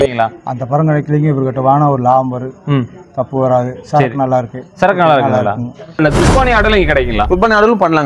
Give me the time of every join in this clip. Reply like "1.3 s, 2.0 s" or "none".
6.0 s